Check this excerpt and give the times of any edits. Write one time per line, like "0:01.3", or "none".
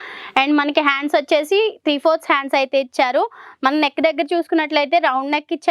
none